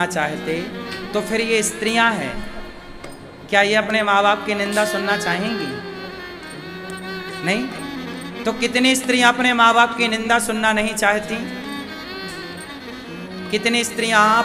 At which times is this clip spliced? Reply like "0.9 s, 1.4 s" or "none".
none